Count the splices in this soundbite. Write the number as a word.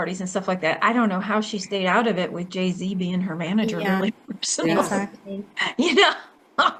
zero